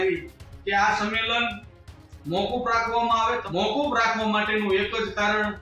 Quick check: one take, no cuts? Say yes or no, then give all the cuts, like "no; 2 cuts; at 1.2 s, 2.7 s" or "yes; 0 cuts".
no; 1 cut; at 3.4 s